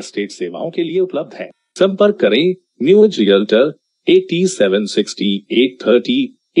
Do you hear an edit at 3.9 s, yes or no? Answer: no